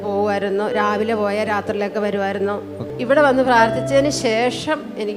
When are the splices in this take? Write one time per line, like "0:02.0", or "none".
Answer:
0:02.9